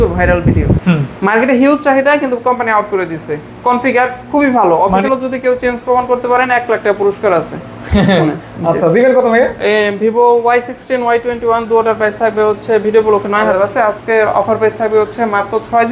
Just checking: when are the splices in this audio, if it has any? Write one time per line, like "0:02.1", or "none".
0:00.8
0:05.0
0:13.5